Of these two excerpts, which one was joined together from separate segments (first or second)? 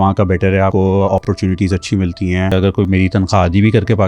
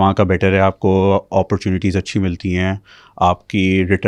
first